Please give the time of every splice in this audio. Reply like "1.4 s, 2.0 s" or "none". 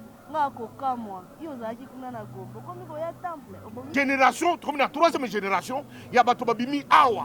3.8 s

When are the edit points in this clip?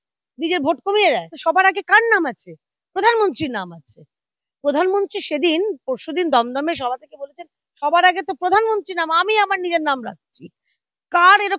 1.3 s

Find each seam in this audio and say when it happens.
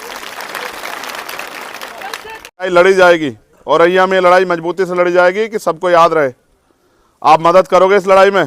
2.7 s

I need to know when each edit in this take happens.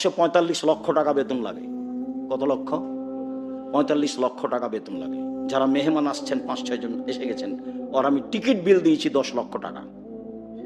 9.8 s

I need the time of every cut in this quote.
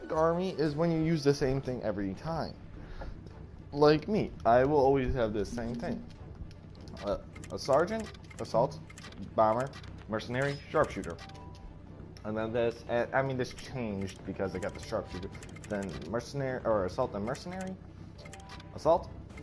none

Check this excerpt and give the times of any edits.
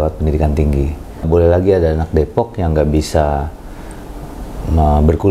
1.2 s

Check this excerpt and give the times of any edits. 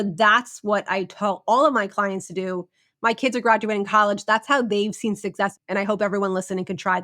5.6 s

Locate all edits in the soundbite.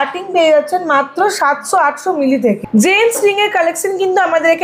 none

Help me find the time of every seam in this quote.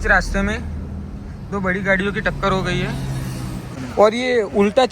3.8 s

